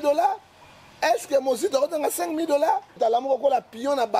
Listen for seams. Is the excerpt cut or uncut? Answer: cut